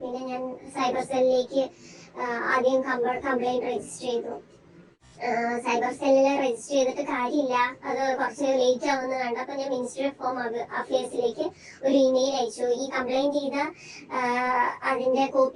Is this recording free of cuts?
yes; 0 cuts

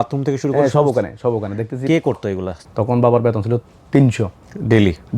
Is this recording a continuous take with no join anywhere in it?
no; 1 cut; at 2.6 s

